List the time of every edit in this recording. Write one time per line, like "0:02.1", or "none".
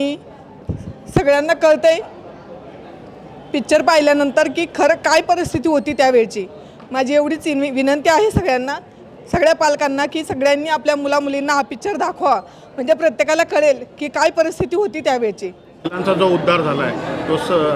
0:16.0